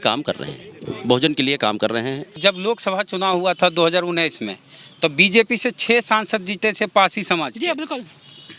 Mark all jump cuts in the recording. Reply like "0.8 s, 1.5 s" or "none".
2.3 s